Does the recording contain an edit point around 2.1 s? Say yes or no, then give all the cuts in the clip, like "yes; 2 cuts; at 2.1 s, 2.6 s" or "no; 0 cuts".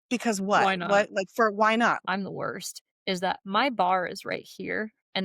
yes; 1 cut; at 2.1 s